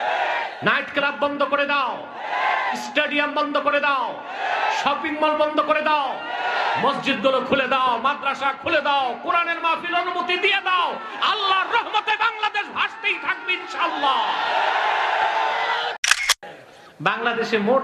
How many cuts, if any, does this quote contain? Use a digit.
1